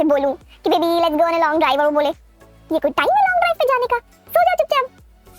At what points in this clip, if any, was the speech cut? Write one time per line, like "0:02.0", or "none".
none